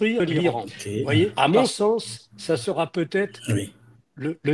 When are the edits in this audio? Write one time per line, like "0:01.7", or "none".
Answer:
0:01.3